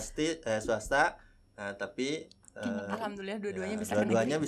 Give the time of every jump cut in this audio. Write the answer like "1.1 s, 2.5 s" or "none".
none